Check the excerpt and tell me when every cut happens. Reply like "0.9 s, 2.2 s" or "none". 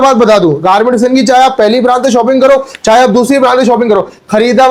none